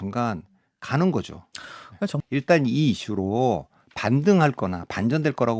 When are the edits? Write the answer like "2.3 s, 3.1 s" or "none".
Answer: 2.2 s